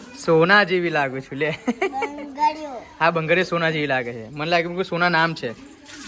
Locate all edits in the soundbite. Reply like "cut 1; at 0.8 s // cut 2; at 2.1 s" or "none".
none